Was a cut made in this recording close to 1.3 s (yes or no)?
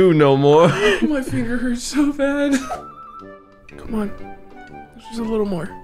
no